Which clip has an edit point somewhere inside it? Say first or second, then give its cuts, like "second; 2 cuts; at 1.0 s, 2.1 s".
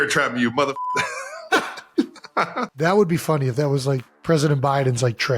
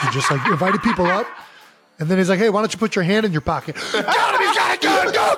first; 3 cuts; at 1.4 s, 2.7 s, 4.1 s